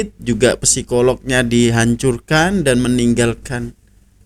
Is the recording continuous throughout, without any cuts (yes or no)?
yes